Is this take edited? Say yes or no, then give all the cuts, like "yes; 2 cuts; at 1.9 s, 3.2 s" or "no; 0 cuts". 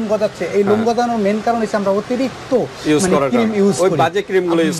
no; 0 cuts